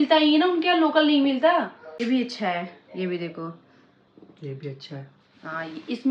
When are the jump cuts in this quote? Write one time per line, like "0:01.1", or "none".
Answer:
0:02.0